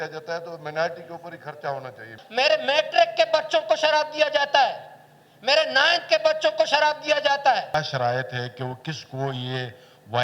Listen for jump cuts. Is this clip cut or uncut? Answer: cut